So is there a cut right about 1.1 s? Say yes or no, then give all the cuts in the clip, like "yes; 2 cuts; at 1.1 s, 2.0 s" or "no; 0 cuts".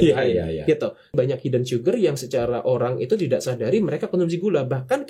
yes; 1 cut; at 1.1 s